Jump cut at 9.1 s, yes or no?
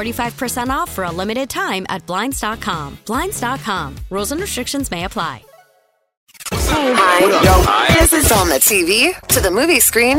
no